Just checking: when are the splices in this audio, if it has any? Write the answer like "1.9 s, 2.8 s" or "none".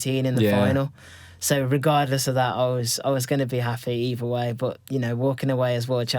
none